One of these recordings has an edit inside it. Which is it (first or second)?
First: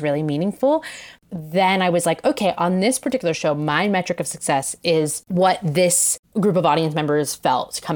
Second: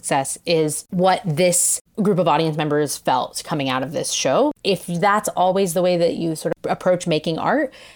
second